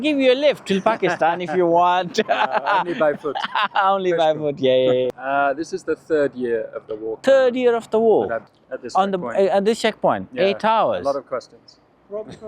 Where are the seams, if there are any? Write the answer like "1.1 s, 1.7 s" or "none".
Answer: 5.1 s, 7.1 s, 8.5 s